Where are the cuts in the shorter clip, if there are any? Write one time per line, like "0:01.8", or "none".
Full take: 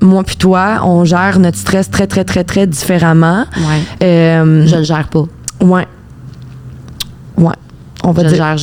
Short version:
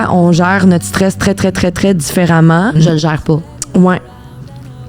0:02.8

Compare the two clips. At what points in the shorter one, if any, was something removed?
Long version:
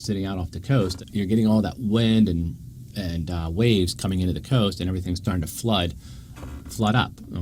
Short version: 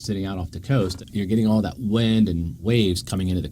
0:02.5

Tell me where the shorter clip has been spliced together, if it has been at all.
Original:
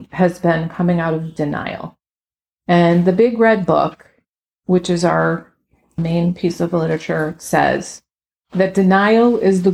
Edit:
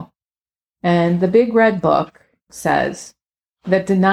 0:02.5

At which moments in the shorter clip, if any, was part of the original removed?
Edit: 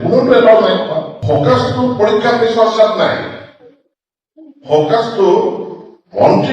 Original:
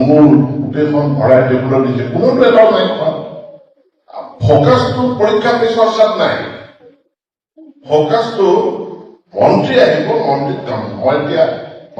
0:01.1

